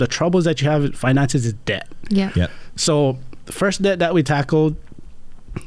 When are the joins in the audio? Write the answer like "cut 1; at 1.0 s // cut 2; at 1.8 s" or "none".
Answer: none